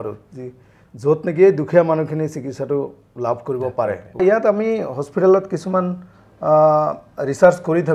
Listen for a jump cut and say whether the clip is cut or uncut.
cut